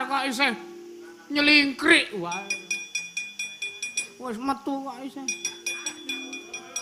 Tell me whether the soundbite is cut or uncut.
uncut